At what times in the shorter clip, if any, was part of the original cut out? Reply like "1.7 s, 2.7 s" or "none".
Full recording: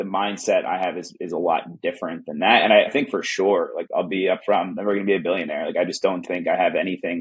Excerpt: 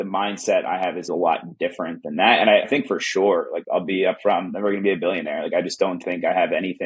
1.1 s